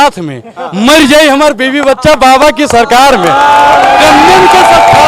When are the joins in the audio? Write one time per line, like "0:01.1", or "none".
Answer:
none

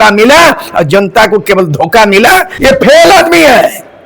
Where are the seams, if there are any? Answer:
0:02.5

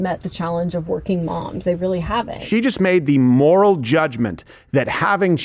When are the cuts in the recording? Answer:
0:02.4

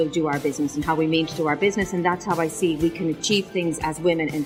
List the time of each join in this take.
none

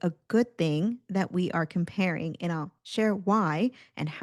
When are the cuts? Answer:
none

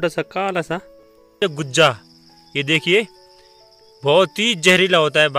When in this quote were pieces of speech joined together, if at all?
0:01.4

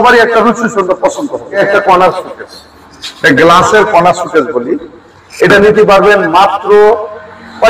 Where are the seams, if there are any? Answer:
0:01.6

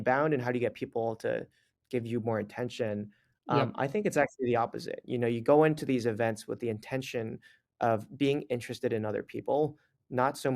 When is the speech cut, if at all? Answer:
none

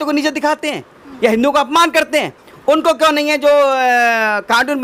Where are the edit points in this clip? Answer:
none

